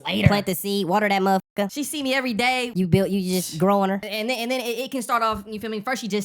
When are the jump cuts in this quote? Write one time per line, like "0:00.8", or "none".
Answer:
0:01.7
0:02.7
0:04.1